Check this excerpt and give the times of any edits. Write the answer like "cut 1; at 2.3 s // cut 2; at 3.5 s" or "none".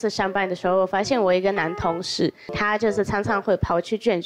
cut 1; at 2.5 s